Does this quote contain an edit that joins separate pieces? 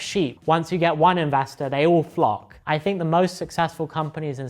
yes; 1 cut; at 2.5 s

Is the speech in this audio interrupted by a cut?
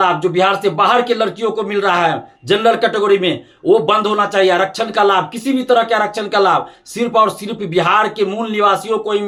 no; 0 cuts

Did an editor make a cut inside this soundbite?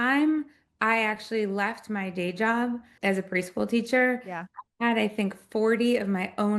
no; 0 cuts

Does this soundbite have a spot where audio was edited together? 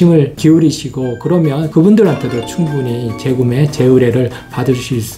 no; 0 cuts

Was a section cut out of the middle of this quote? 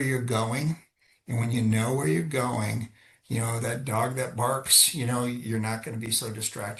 no; 0 cuts

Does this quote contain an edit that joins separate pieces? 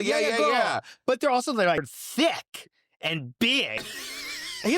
yes; 1 cut; at 2.0 s

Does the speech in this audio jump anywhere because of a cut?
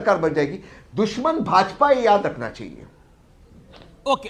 no; 0 cuts

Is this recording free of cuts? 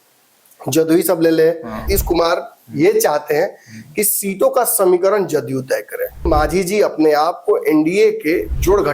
no; 2 cuts; at 1.9 s, 6.3 s

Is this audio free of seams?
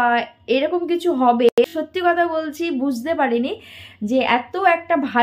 no; 1 cut; at 1.5 s

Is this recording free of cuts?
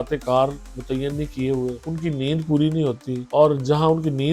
no; 2 cuts; at 1.9 s, 3.1 s

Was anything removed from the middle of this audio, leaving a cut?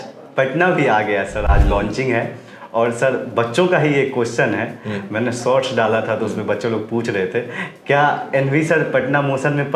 no; 0 cuts

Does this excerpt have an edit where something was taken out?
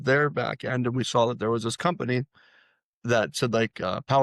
no; 0 cuts

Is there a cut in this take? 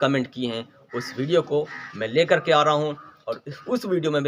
no; 0 cuts

